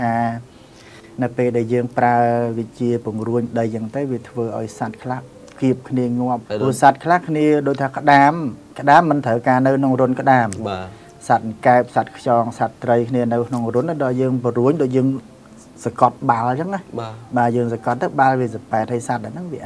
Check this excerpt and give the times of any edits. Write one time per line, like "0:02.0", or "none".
0:06.4

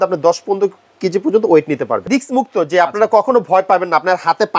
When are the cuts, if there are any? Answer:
0:02.1

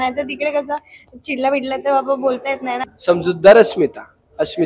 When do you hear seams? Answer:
0:02.8

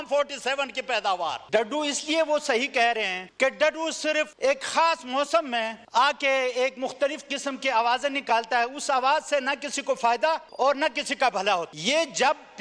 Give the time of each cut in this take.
0:01.4
0:03.2
0:04.3
0:05.8
0:10.5
0:11.7

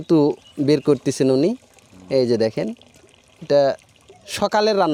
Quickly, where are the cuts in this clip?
none

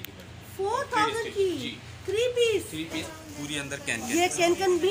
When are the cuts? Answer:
0:03.0

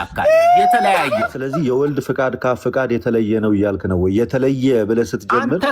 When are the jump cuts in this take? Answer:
0:01.4

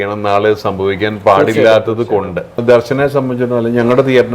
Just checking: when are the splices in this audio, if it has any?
0:02.6

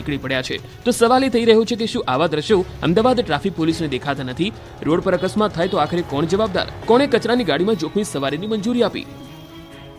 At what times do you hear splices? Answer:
0:04.7

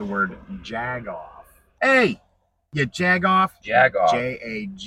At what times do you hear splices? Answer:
0:01.7
0:02.6
0:03.6

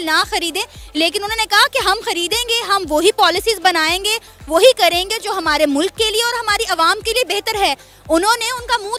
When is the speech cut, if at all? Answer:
none

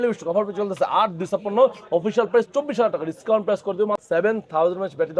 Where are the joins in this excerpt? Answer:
0:04.0

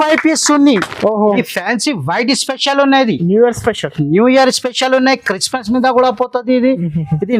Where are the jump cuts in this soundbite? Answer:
0:01.4

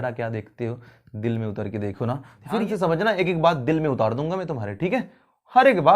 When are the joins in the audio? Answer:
0:02.6

